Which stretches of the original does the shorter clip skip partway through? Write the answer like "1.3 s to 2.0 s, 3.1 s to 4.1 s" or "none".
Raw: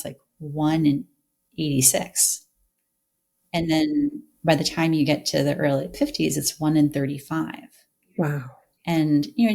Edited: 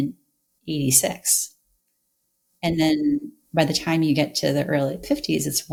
none

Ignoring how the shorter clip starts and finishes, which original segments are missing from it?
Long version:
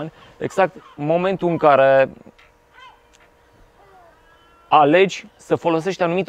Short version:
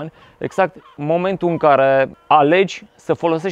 2.2 s to 4.6 s

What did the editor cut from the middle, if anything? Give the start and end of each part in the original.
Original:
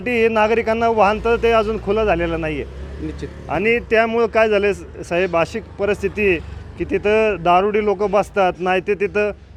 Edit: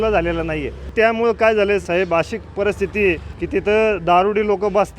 2.8 s to 3.8 s, 4.8 s to 5.1 s, 6.5 s to 6.7 s

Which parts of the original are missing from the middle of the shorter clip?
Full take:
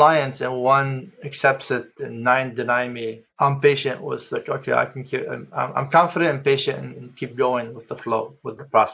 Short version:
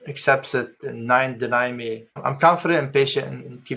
3.3 s to 5.7 s

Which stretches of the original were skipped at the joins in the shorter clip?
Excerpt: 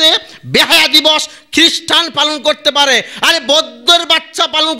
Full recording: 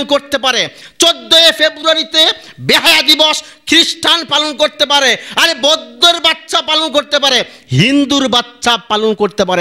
none

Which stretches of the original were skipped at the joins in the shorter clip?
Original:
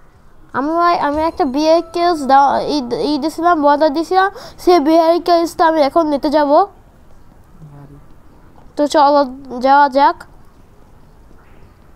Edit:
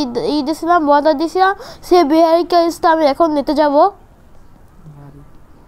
none

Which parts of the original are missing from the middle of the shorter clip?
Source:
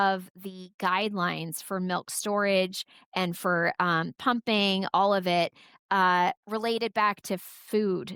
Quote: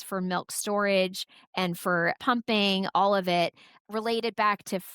3.7 s to 4.1 s, 5.8 s to 6.4 s

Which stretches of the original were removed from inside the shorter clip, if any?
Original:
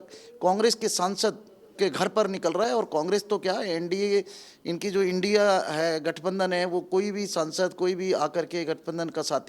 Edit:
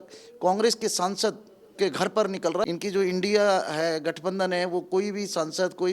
2.7 s to 4.7 s

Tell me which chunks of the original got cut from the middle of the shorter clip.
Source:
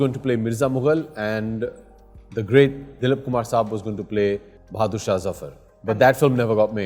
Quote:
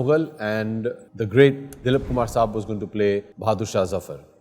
1.9 s to 2.3 s, 4.5 s to 4.6 s

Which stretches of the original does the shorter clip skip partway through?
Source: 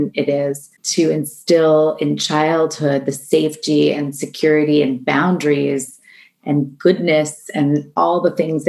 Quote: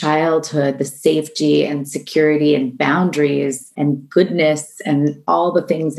5.9 s to 6.3 s

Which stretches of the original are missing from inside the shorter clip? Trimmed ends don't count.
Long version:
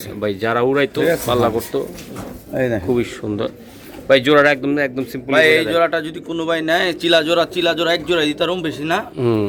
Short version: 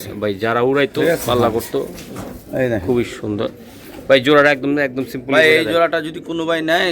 none

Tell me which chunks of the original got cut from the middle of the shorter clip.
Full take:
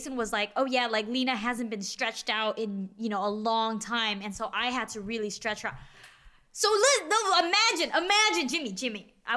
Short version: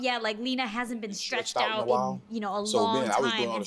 none

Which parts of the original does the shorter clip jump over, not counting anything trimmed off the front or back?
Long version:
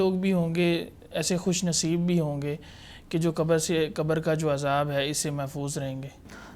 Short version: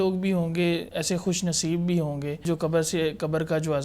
0.9 s to 1.1 s, 2.6 s to 3.2 s

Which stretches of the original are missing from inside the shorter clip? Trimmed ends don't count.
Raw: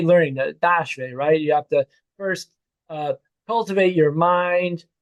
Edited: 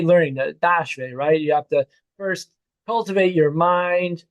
2.7 s to 3.3 s

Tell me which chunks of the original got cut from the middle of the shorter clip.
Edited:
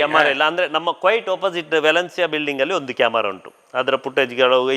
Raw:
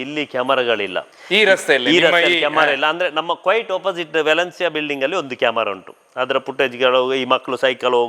none

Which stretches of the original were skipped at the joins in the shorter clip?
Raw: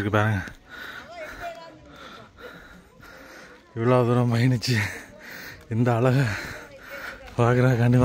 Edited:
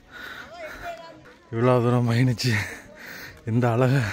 1.9 s to 3.5 s

